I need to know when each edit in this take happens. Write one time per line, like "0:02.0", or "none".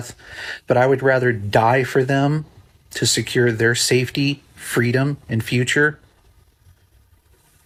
none